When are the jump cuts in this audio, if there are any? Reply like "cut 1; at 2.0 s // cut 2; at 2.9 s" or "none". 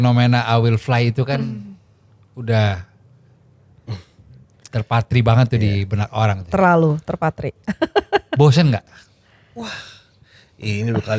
none